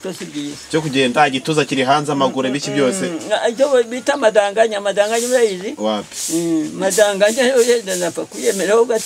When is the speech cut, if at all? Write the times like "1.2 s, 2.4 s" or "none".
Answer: none